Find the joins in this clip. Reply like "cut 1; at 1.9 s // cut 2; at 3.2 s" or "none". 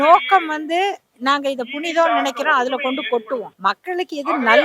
cut 1; at 3.5 s